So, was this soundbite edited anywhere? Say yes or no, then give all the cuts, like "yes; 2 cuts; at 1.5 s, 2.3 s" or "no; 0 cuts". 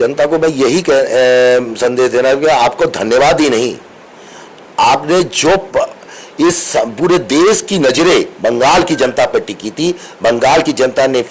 no; 0 cuts